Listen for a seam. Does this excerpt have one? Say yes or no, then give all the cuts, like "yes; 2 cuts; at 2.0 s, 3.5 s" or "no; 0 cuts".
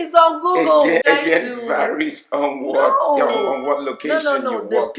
yes; 1 cut; at 1.0 s